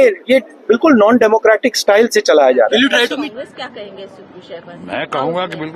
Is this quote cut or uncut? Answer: cut